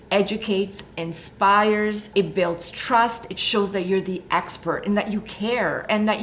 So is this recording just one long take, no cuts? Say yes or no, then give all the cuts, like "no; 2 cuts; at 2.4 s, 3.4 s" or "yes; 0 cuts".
no; 1 cut; at 2.0 s